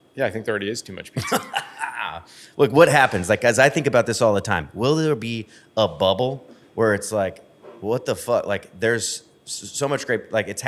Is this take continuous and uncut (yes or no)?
yes